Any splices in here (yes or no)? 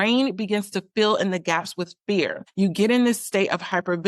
yes